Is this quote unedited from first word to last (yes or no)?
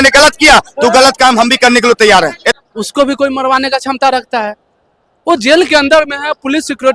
no